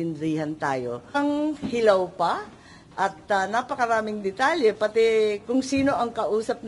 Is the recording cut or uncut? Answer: cut